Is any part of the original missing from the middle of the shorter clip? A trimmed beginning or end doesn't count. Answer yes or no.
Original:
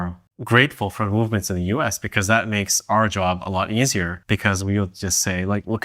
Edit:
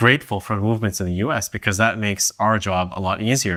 no